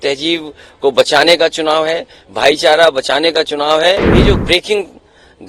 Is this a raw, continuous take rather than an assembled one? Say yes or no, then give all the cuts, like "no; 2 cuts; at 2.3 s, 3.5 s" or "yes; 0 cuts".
no; 1 cut; at 4.1 s